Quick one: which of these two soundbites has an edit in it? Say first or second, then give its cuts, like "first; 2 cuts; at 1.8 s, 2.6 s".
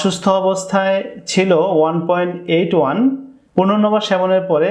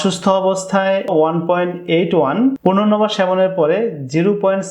second; 2 cuts; at 1.1 s, 2.6 s